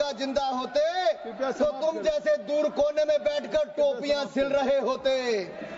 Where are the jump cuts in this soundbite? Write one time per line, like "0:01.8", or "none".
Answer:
none